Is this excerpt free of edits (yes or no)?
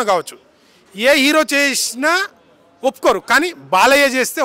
yes